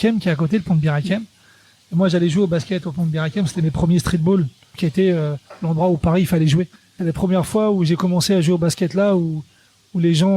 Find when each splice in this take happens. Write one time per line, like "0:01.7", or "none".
0:04.8
0:06.9